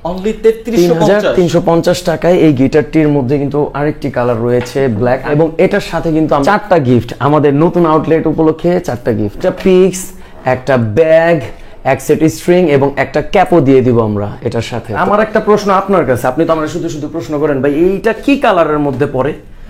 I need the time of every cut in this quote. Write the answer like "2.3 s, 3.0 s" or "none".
5.3 s, 6.4 s, 9.4 s, 15.0 s